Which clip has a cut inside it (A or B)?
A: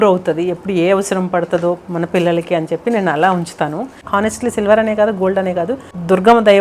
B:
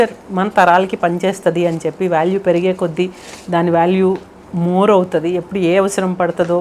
A